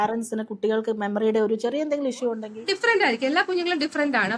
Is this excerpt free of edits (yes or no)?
no